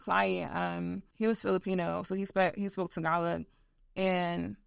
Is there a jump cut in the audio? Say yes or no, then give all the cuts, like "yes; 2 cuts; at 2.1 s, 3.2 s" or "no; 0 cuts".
yes; 1 cut; at 1.0 s